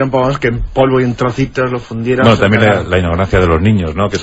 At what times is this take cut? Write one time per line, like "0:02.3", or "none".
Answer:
none